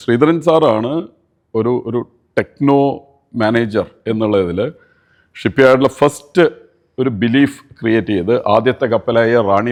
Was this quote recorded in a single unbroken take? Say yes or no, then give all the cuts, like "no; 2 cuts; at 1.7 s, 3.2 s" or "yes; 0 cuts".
yes; 0 cuts